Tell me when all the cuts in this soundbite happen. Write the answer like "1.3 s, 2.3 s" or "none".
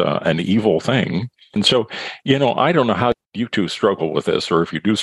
1.6 s, 3.2 s